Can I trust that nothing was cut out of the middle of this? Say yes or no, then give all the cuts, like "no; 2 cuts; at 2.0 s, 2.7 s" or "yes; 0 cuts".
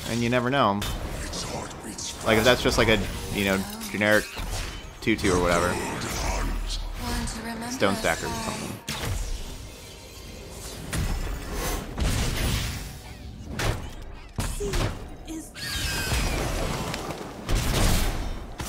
yes; 0 cuts